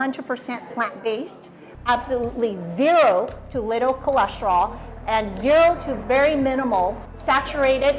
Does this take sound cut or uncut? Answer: cut